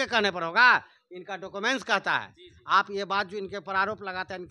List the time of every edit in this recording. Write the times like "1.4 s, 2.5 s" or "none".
none